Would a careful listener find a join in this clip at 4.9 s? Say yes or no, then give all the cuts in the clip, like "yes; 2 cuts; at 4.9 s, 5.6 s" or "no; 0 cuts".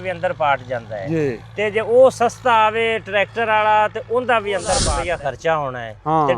yes; 1 cut; at 4.9 s